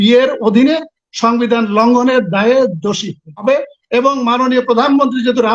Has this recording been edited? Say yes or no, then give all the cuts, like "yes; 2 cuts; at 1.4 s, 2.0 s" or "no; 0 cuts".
yes; 1 cut; at 3.4 s